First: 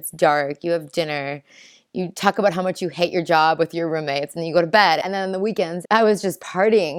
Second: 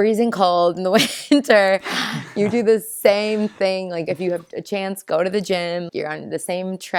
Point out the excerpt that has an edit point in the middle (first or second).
second